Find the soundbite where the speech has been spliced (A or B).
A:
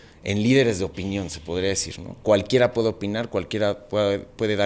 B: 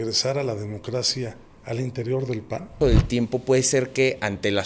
B